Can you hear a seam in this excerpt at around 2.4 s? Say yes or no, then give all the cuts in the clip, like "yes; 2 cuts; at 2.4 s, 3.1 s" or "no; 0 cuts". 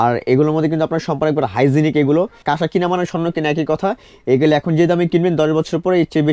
yes; 1 cut; at 2.4 s